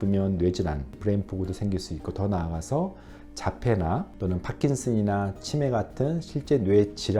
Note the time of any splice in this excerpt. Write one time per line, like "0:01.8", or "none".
0:01.0
0:04.1